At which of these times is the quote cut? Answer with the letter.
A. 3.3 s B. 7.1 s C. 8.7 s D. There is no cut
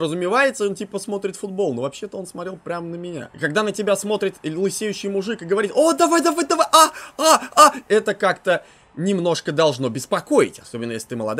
A